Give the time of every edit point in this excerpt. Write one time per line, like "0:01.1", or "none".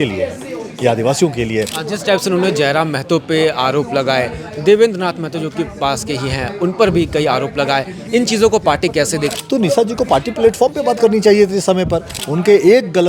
0:01.8
0:09.3
0:12.2